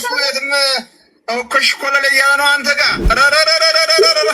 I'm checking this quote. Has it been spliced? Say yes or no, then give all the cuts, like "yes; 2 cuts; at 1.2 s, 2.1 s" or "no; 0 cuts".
yes; 1 cut; at 3.0 s